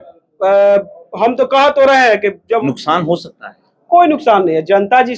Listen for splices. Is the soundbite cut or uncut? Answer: cut